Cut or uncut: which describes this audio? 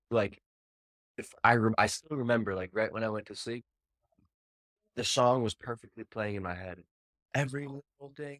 uncut